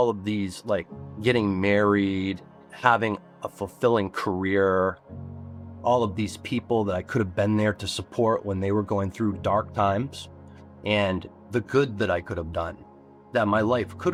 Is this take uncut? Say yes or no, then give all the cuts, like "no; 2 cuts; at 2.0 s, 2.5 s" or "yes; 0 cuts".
yes; 0 cuts